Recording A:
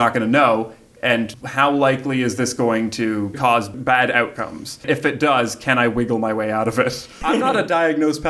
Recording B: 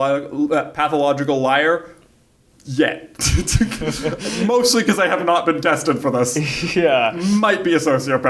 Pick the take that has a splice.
A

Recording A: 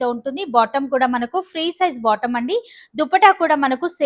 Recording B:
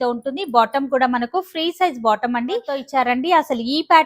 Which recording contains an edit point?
B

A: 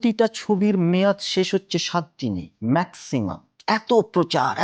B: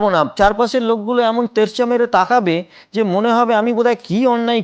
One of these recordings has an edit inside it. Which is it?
A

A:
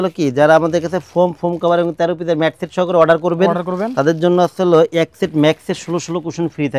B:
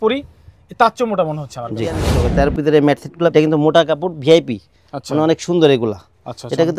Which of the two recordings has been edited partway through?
B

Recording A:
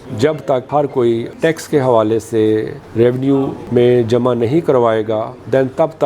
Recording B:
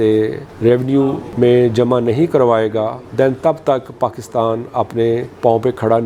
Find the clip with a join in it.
A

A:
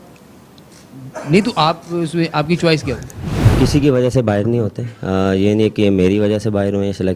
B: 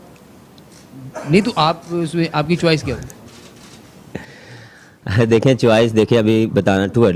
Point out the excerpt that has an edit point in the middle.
A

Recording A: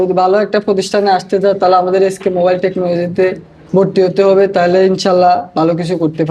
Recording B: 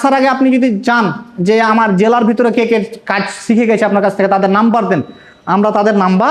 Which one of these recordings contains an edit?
A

